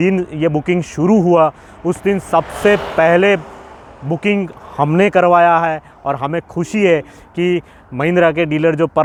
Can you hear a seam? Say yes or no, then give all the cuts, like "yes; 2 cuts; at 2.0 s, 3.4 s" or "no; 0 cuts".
no; 0 cuts